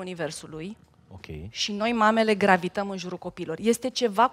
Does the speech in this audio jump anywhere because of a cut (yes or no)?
no